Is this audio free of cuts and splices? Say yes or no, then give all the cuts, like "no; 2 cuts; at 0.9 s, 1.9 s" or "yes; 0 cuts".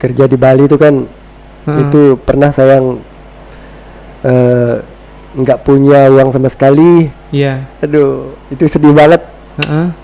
yes; 0 cuts